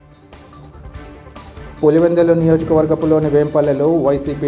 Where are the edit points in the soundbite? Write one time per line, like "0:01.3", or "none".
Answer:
0:01.2

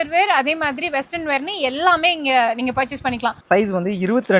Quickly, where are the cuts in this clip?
0:03.4

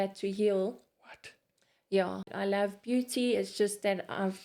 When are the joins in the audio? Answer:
0:02.3

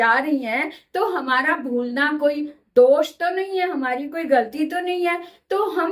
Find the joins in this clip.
none

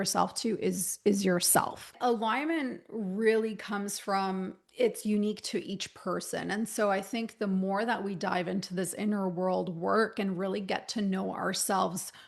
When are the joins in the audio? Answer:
0:01.9

